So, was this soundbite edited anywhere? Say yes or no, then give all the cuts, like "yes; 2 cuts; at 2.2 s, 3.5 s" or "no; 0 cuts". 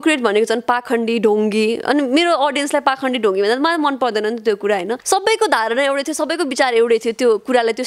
yes; 1 cut; at 5.0 s